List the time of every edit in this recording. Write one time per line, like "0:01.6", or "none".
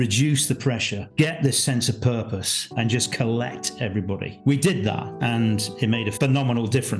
0:01.0
0:02.6
0:04.3
0:05.1
0:06.1

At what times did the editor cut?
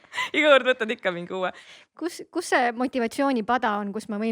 0:01.7

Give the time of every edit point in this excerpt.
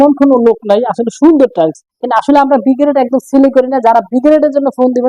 0:02.1

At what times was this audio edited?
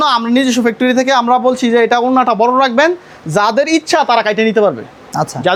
none

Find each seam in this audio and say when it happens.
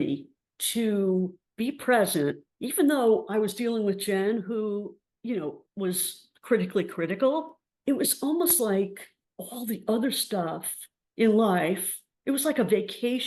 none

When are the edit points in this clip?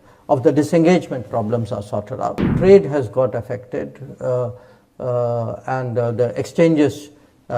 0:02.5

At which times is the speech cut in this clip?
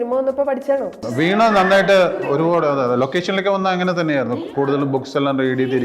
0:01.1
0:02.2

